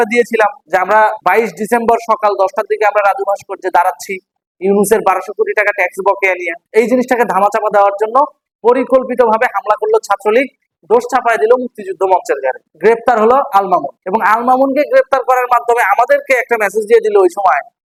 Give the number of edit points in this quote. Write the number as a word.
zero